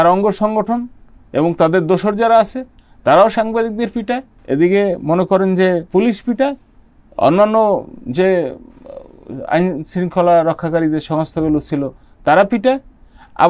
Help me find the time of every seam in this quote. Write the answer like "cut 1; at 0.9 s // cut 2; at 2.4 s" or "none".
cut 1; at 4.3 s // cut 2; at 5.9 s